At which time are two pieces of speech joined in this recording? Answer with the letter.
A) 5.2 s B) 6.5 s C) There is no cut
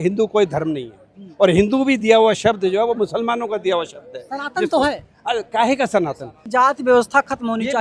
B